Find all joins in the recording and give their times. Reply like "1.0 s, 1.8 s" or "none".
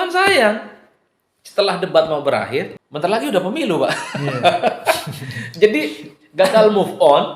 2.7 s